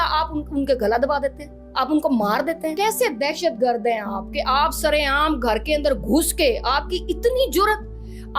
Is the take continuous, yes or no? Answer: no